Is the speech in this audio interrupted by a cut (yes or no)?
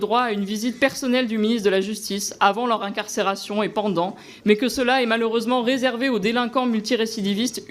no